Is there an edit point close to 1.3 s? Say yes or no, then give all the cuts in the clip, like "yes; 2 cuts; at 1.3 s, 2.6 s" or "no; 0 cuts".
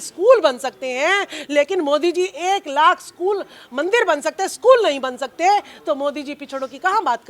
no; 0 cuts